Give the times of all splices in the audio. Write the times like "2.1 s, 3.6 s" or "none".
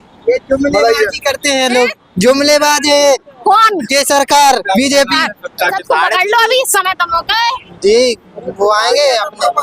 5.8 s